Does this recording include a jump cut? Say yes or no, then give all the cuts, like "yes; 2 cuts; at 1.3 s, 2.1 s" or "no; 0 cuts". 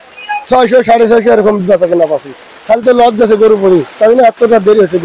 no; 0 cuts